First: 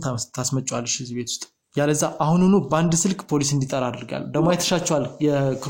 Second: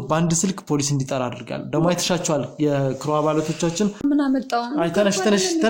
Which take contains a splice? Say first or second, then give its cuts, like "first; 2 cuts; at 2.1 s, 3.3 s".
second; 1 cut; at 4.0 s